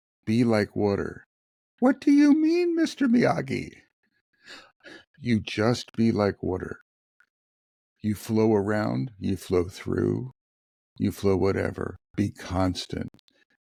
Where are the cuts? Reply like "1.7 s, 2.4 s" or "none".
none